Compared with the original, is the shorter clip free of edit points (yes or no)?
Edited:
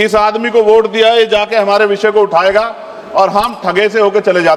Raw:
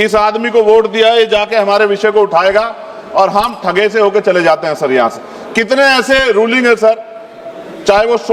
yes